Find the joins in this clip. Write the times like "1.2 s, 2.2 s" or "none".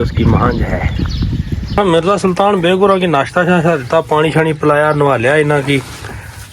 1.7 s